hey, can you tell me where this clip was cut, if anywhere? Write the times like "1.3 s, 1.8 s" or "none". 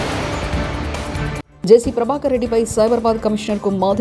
none